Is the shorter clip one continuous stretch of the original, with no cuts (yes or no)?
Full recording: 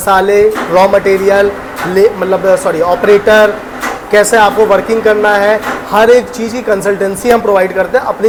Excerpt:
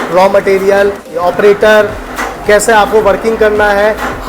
no